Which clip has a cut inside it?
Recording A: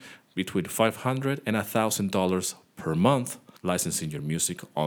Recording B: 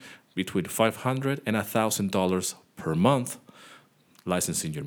A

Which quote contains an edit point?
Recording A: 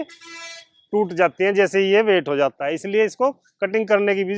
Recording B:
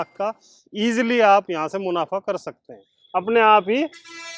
B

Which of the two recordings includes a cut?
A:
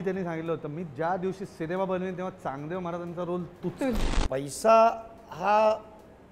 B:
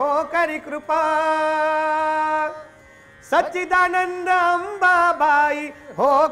A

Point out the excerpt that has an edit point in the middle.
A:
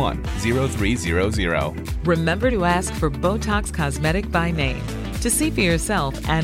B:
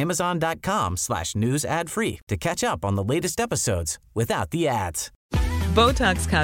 B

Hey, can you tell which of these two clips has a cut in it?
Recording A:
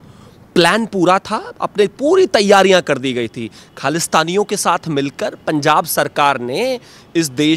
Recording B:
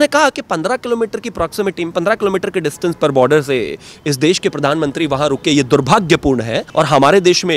B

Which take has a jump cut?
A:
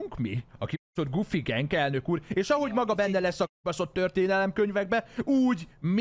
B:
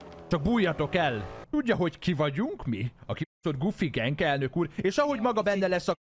B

